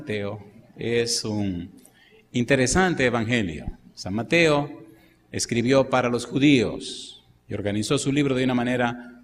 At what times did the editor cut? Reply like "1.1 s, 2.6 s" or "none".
1.0 s